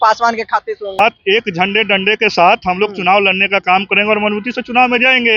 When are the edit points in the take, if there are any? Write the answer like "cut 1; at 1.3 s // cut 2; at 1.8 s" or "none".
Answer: cut 1; at 1.0 s